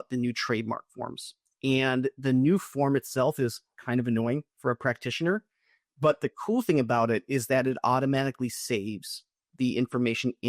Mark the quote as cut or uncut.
uncut